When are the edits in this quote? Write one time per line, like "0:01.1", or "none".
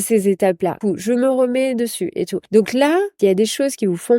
0:00.8
0:02.4
0:03.1

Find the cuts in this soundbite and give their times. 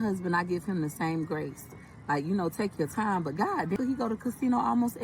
0:03.8

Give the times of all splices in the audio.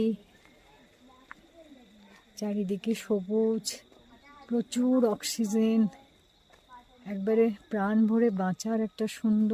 none

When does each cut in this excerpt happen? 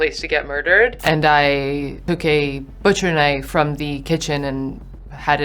0:01.0
0:01.9
0:03.4

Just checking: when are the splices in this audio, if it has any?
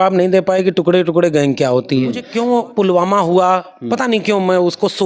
0:02.2

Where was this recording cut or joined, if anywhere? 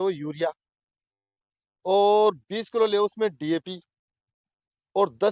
none

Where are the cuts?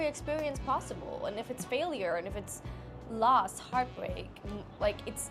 none

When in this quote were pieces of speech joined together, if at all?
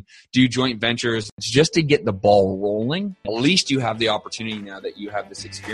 0:01.4
0:03.2

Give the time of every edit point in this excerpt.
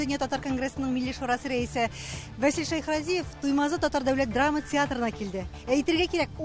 none

